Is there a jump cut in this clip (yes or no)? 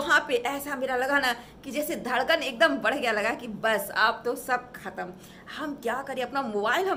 no